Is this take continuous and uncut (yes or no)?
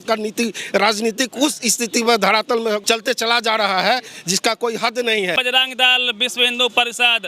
no